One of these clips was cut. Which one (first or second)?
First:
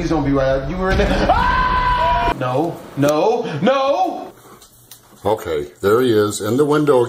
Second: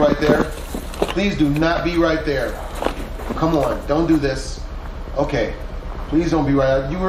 first